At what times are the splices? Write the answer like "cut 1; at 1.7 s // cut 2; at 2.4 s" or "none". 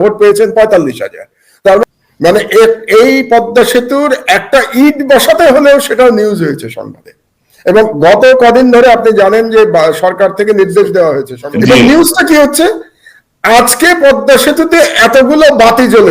cut 1; at 1.8 s